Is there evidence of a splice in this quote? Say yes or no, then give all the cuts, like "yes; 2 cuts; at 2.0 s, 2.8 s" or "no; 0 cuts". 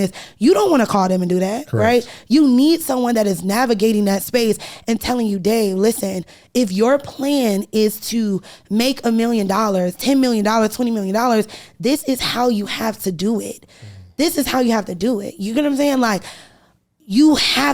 no; 0 cuts